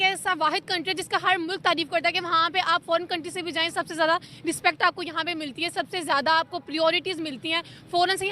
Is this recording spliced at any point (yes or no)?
no